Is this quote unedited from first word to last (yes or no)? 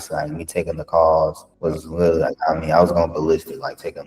no